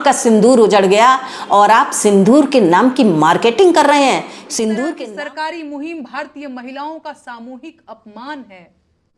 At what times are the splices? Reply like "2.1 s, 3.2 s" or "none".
4.9 s